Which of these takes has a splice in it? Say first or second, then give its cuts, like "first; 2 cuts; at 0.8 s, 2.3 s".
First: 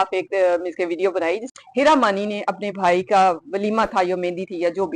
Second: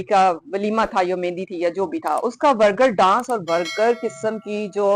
first; 1 cut; at 1.5 s